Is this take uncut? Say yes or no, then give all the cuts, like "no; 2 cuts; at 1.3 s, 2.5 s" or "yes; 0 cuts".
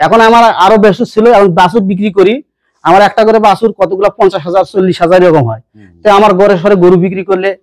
yes; 0 cuts